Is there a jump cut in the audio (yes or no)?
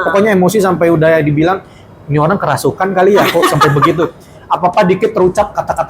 no